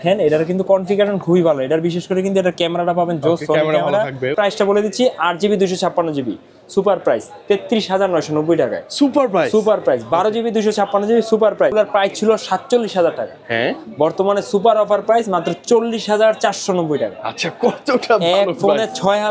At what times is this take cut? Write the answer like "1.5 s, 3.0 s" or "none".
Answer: 4.3 s, 11.7 s

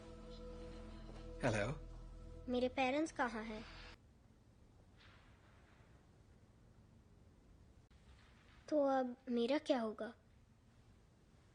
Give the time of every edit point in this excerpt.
4.0 s

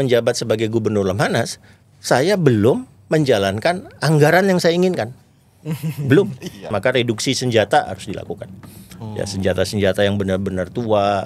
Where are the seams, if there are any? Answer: 6.7 s

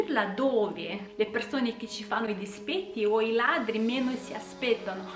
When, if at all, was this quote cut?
1.0 s

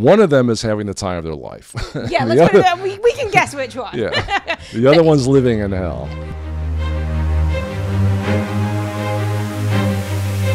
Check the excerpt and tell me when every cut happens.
6.2 s

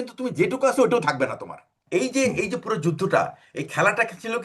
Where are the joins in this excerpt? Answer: 1.8 s

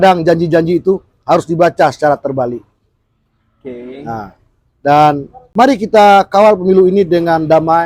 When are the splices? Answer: 5.4 s

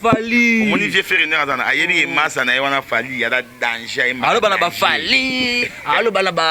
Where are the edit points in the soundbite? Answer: none

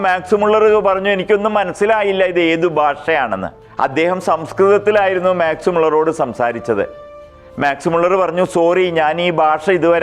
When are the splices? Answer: 3.6 s

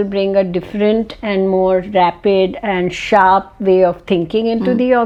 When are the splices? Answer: none

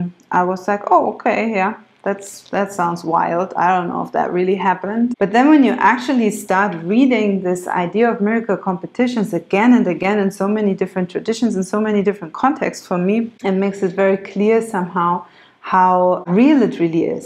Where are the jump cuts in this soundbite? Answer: 5.1 s, 13.3 s, 16.2 s

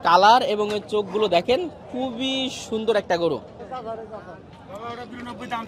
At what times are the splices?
none

